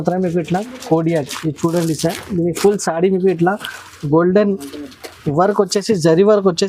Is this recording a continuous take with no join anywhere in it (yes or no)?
no